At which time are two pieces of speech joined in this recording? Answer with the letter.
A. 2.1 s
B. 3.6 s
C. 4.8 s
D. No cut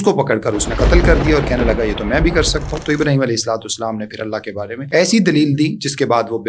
C